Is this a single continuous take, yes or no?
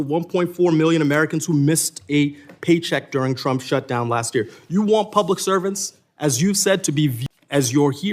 no